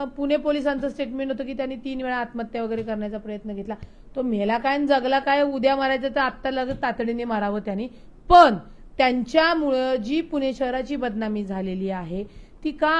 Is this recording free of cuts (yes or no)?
yes